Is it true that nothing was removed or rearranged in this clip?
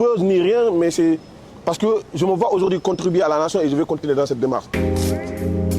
no; 1 cut; at 4.7 s

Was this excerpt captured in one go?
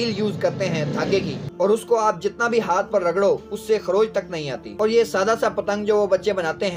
yes; 0 cuts

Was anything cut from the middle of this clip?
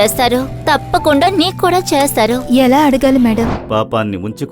yes; 1 cut; at 3.6 s

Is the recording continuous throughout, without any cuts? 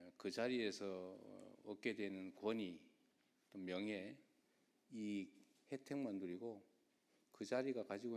yes; 0 cuts

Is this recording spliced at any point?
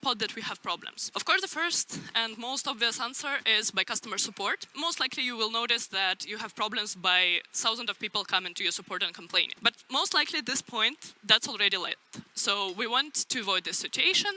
yes; 3 cuts; at 0.9 s, 4.7 s, 9.5 s

